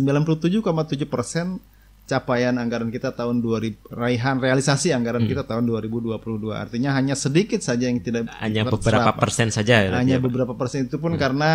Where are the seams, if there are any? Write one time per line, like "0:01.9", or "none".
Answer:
none